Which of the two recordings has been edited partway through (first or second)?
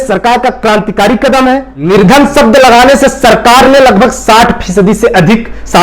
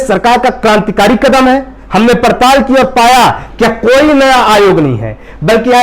first